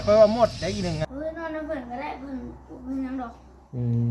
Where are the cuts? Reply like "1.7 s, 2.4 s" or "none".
1.0 s